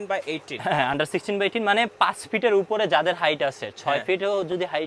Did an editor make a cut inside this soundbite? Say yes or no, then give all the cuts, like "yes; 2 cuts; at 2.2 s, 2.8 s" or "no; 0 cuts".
no; 0 cuts